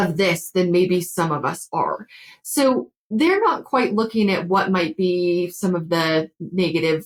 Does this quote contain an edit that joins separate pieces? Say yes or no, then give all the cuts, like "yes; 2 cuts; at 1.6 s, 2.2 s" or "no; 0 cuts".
no; 0 cuts